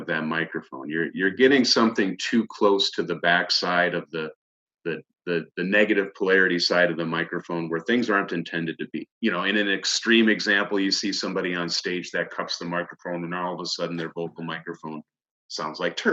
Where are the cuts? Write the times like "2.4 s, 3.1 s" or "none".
9.1 s